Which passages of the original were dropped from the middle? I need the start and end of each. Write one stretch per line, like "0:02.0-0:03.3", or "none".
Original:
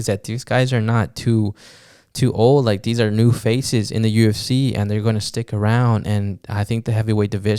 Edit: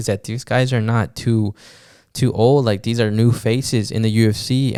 none